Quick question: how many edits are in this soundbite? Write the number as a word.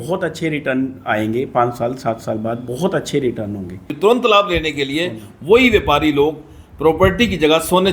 one